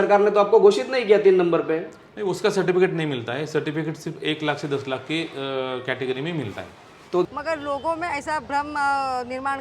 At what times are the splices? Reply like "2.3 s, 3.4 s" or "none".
7.3 s